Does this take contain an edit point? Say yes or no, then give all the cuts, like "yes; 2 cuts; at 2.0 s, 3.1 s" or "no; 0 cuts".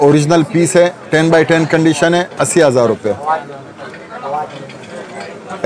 no; 0 cuts